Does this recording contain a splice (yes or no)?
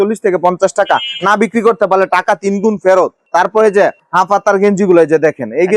no